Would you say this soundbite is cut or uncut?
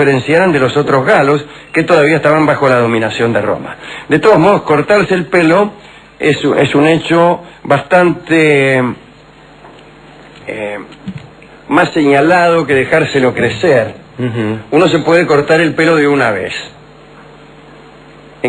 uncut